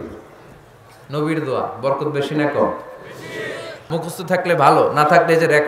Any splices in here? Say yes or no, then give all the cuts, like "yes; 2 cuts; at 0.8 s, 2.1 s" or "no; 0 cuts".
yes; 1 cut; at 3.8 s